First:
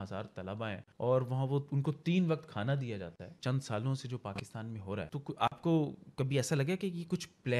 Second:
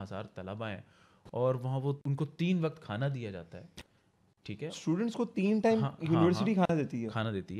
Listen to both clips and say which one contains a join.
first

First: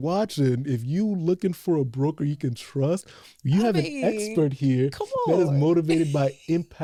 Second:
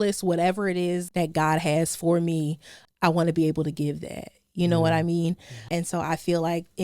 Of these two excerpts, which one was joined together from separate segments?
second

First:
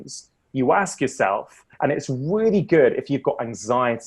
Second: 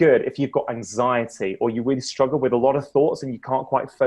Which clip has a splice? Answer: first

